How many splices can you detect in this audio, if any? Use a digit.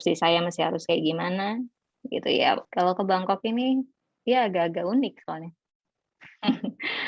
1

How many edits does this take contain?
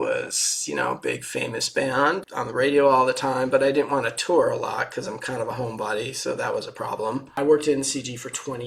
2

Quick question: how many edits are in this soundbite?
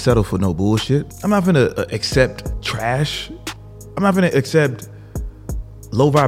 2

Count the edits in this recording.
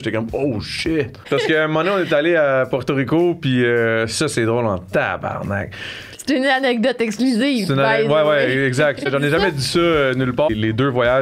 3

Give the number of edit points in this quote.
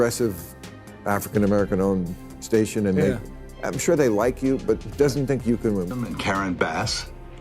1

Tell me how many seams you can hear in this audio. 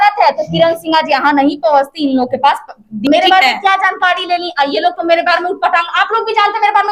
1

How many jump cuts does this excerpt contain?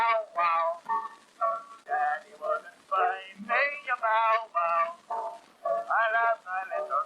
1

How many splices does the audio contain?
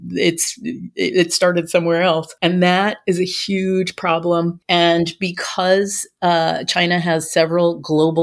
2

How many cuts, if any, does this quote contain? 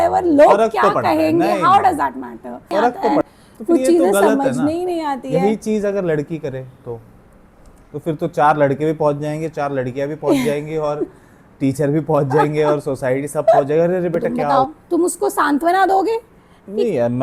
2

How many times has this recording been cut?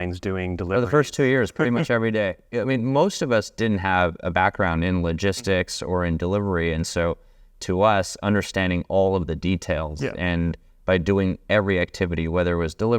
1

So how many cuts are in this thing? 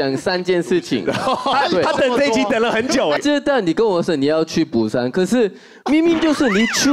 2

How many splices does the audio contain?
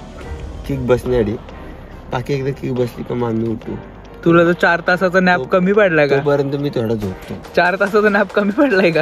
0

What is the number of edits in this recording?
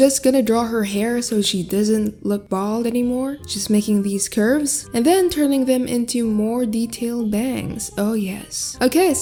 0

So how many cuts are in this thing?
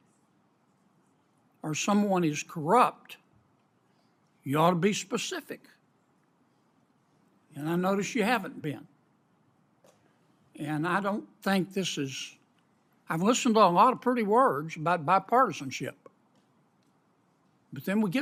0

